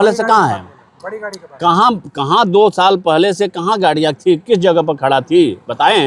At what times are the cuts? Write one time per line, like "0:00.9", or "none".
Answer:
none